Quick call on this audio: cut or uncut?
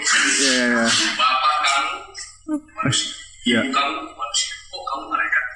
uncut